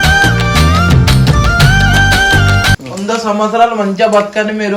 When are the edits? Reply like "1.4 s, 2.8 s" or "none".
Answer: 2.8 s